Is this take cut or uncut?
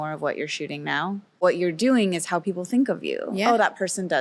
cut